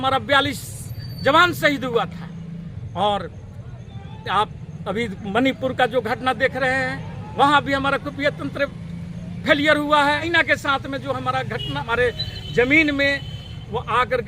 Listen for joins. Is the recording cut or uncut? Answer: cut